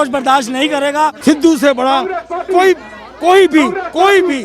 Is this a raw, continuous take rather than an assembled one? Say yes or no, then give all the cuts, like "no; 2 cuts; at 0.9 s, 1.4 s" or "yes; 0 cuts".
no; 1 cut; at 1.2 s